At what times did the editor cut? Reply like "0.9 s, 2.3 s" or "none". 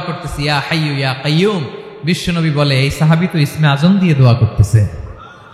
none